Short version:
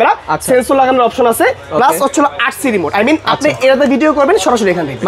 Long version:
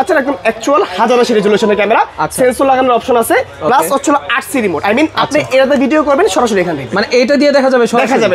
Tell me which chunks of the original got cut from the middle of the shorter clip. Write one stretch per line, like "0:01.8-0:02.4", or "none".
none